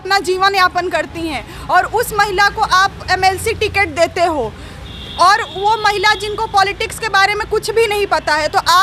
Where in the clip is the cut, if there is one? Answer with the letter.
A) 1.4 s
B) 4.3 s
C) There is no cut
C